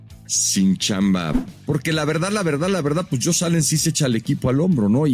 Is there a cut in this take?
yes; 1 cut; at 1.4 s

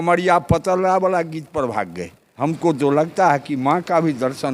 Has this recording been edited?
yes; 1 cut; at 2.2 s

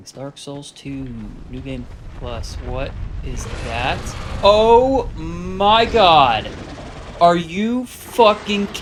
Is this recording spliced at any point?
no; 0 cuts

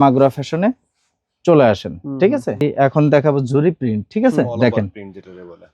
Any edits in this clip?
yes; 1 cut; at 2.7 s

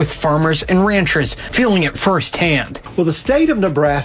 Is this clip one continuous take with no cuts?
no; 2 cuts; at 1.4 s, 2.8 s

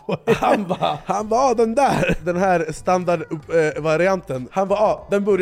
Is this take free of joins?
no; 3 cuts; at 1.0 s, 2.2 s, 4.4 s

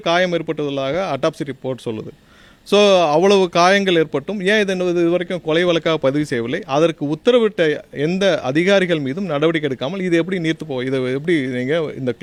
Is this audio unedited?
yes; 0 cuts

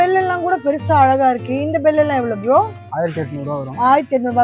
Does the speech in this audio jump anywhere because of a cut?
no; 0 cuts

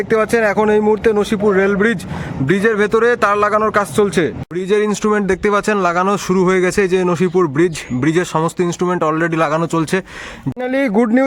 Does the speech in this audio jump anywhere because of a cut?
yes; 2 cuts; at 4.5 s, 10.5 s

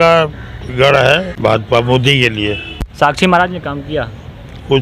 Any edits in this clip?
yes; 2 cuts; at 1.3 s, 2.9 s

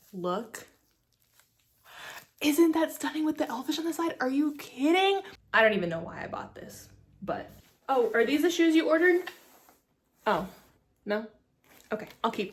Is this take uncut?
no; 2 cuts; at 5.4 s, 7.7 s

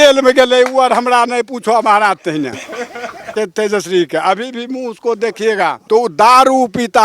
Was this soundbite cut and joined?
yes; 2 cuts; at 3.3 s, 5.8 s

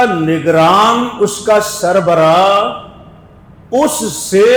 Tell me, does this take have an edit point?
no; 0 cuts

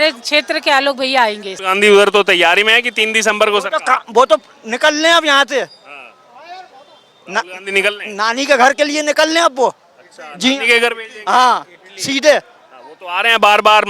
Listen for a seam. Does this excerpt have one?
yes; 1 cut; at 1.5 s

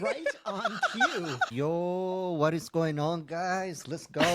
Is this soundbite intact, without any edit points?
no; 1 cut; at 1.5 s

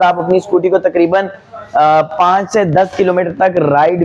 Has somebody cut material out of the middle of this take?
no; 0 cuts

